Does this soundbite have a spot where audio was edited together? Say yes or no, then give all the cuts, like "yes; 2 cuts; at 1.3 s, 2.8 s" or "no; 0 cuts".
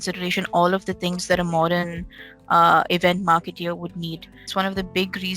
yes; 1 cut; at 4.5 s